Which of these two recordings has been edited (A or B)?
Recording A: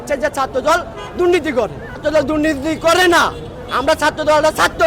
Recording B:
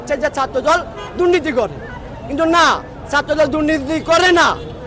A